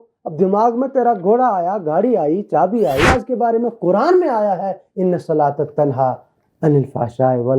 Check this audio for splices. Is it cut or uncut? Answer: cut